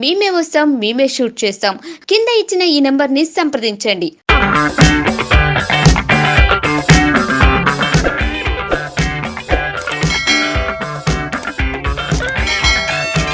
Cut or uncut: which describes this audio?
uncut